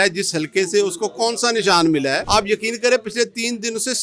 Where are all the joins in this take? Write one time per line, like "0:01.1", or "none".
0:02.2